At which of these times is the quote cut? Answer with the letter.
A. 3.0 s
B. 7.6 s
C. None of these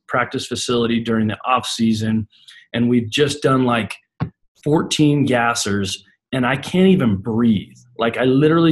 C